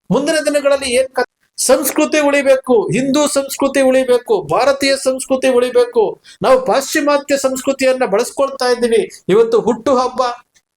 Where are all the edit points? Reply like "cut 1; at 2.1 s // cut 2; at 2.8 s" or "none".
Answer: cut 1; at 1.3 s